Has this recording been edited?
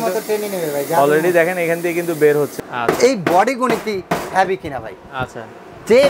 yes; 1 cut; at 2.6 s

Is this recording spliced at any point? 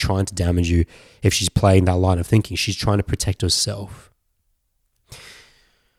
no; 0 cuts

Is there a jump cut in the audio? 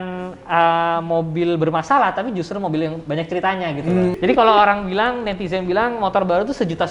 yes; 1 cut; at 4.2 s

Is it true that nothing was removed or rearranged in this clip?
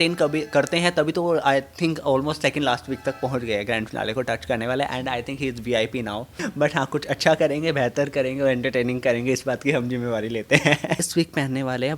no; 2 cuts; at 6.4 s, 11.0 s

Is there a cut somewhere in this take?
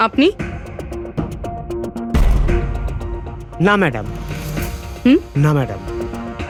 no; 0 cuts

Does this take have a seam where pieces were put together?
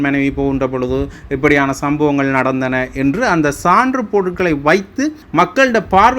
yes; 1 cut; at 5.2 s

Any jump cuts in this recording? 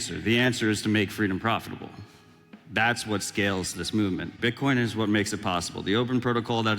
yes; 1 cut; at 4.3 s

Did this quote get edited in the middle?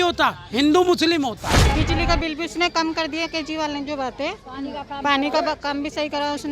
yes; 1 cut; at 1.6 s

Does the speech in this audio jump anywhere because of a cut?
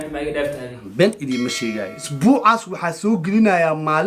yes; 1 cut; at 2.0 s

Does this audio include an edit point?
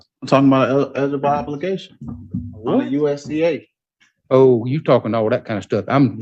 no; 0 cuts

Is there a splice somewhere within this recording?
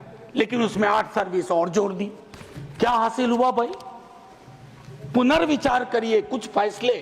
no; 0 cuts

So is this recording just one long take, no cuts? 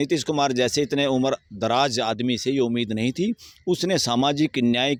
yes; 0 cuts

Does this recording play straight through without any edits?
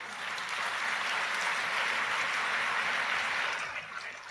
yes; 0 cuts

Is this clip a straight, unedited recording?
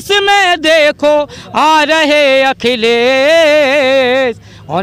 yes; 0 cuts

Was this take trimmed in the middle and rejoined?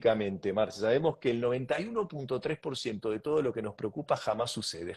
no; 0 cuts

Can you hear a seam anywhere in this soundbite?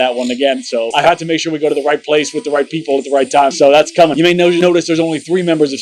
yes; 1 cut; at 4.2 s

